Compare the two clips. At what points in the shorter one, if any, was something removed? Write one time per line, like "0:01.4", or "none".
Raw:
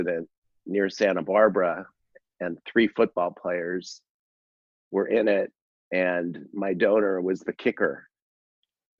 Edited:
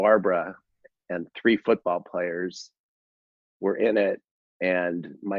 none